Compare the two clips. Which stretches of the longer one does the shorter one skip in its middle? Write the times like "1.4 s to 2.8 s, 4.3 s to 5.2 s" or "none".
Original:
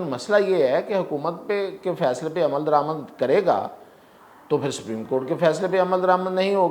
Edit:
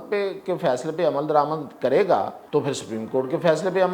3.8 s to 4.4 s